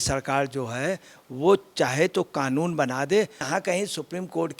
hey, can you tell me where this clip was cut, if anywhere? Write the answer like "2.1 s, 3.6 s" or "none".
3.5 s